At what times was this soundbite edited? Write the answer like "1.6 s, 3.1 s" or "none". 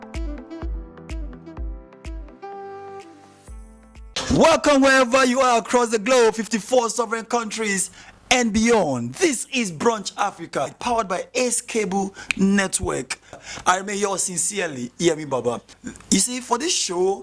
15.7 s